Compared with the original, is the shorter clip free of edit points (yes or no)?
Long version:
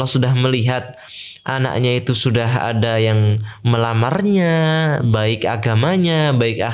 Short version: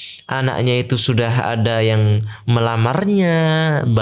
yes